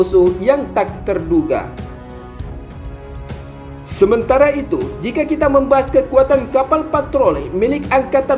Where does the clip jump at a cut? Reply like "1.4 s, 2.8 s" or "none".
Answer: 1.7 s, 3.6 s